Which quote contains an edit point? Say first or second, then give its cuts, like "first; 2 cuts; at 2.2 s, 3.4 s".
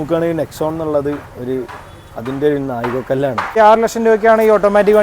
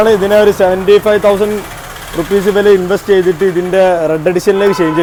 first; 1 cut; at 3.5 s